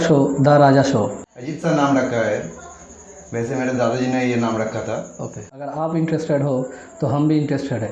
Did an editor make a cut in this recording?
yes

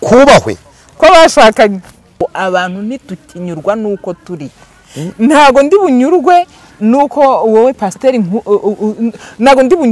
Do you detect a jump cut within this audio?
yes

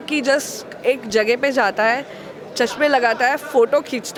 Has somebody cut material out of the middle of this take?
no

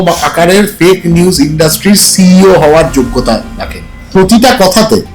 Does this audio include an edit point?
yes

